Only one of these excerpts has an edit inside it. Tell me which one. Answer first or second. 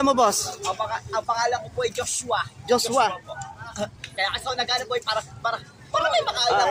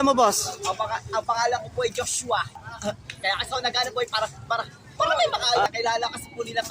second